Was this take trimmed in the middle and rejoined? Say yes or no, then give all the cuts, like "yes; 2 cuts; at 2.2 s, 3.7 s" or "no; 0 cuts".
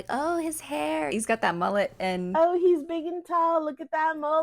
yes; 1 cut; at 1.1 s